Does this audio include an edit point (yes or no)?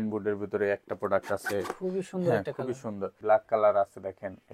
yes